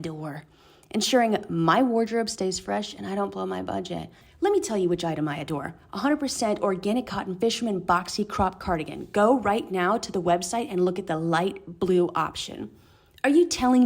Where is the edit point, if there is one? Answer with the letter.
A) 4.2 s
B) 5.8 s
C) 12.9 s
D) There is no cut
A